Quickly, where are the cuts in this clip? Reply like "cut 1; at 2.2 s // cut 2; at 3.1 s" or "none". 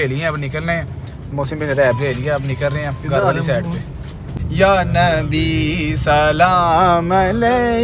cut 1; at 3.9 s